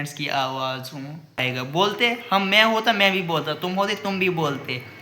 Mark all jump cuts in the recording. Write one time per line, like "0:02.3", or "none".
0:01.4